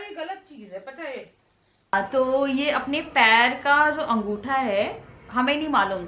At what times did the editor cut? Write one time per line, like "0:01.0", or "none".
0:01.9